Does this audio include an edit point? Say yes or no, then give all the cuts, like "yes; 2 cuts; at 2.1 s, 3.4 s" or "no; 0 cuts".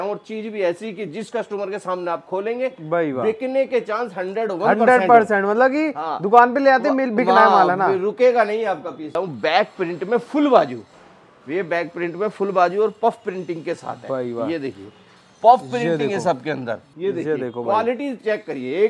yes; 2 cuts; at 9.1 s, 16.9 s